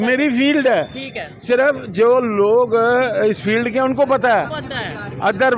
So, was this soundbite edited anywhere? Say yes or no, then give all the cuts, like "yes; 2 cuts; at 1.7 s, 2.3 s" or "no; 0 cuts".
no; 0 cuts